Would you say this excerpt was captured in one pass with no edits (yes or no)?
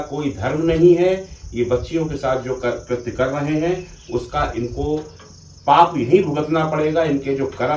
yes